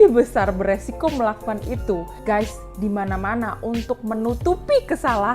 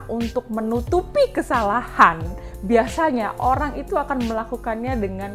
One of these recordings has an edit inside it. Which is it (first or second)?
first